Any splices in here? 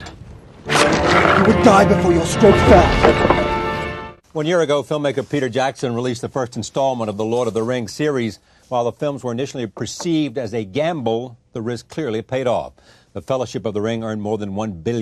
no; 0 cuts

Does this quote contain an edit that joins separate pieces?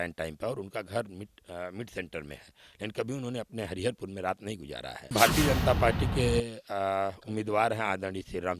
yes; 1 cut; at 5.1 s

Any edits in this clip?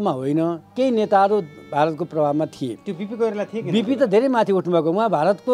no; 0 cuts

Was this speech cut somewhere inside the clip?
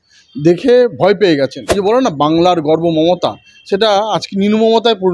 yes; 1 cut; at 1.8 s

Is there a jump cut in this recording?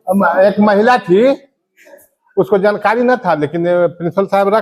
no; 0 cuts

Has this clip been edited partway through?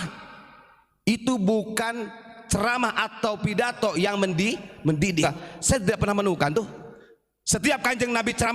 yes; 1 cut; at 5.2 s

